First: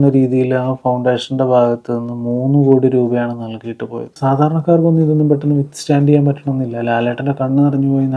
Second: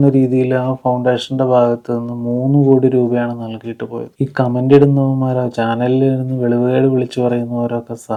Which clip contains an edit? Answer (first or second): first